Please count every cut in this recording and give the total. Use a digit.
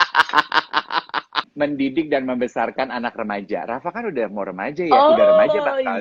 1